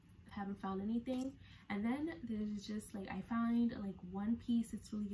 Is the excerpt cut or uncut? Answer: uncut